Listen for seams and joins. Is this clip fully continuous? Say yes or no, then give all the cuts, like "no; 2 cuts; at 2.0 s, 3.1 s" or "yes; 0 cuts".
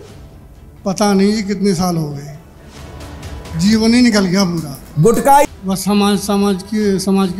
no; 1 cut; at 5.5 s